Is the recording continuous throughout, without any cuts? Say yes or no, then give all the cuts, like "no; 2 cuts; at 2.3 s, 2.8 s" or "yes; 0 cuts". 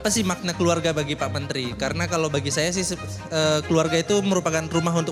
yes; 0 cuts